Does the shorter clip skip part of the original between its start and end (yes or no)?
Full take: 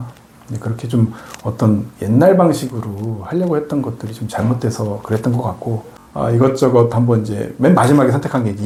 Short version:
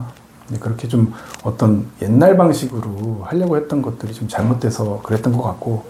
no